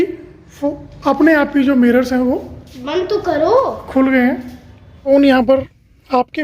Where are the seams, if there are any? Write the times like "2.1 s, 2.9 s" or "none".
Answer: 5.0 s